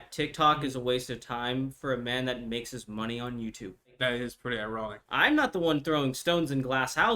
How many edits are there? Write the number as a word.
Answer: two